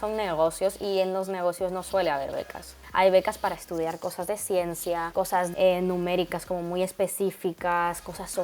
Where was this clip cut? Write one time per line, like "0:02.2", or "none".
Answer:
0:02.8
0:05.3